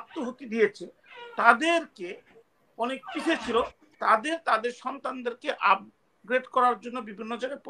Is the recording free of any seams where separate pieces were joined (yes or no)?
yes